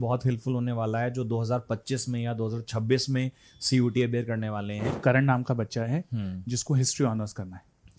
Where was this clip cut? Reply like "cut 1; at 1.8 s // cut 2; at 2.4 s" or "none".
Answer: cut 1; at 4.9 s